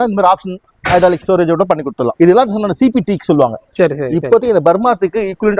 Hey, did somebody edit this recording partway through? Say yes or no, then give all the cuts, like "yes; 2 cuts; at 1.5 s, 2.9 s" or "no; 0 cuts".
yes; 1 cut; at 2.1 s